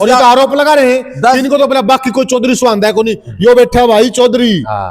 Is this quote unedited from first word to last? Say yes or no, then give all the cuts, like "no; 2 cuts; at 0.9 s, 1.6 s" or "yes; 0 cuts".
yes; 0 cuts